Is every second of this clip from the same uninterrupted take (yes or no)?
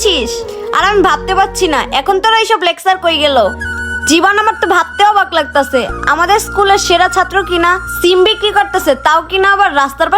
yes